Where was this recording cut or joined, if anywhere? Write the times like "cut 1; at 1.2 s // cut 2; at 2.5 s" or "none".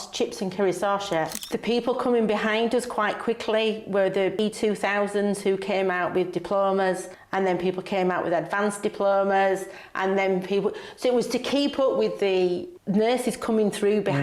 cut 1; at 1.4 s

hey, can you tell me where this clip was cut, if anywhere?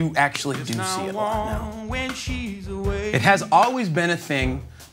cut 1; at 0.8 s // cut 2; at 3.1 s

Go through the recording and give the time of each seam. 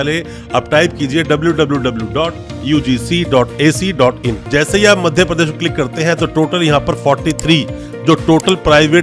cut 1; at 4.4 s

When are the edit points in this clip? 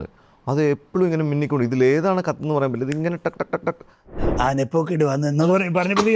cut 1; at 4.2 s

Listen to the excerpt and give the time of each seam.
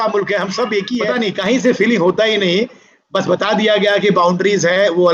cut 1; at 1.1 s

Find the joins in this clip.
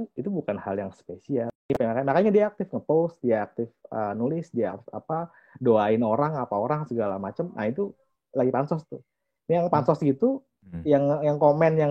cut 1; at 1.7 s

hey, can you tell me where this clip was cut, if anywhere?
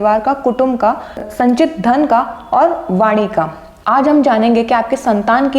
cut 1; at 1.3 s

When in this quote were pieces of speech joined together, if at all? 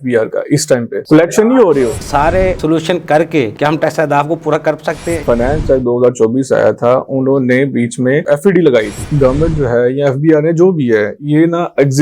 cut 1; at 1.9 s // cut 2; at 5.2 s // cut 3; at 9.1 s

